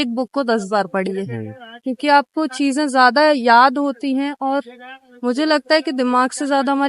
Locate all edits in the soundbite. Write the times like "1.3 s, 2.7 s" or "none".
none